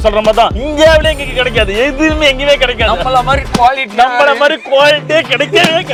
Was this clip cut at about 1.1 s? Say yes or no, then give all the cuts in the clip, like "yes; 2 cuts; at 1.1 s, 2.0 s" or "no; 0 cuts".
no; 0 cuts